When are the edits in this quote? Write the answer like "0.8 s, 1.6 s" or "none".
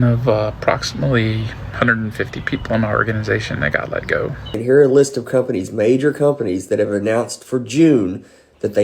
4.6 s